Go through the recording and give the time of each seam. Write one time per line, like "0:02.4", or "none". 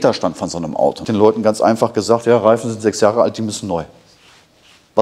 0:01.0